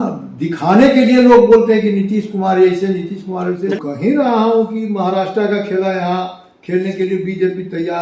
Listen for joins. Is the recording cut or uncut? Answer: cut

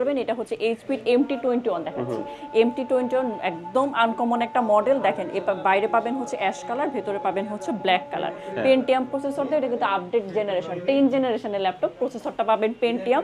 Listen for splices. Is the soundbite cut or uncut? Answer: uncut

